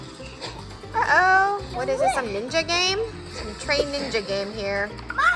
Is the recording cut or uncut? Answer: cut